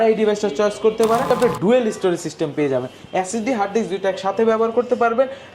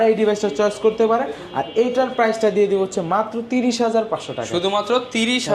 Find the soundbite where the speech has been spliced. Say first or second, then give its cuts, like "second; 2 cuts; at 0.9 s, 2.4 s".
first; 1 cut; at 1.3 s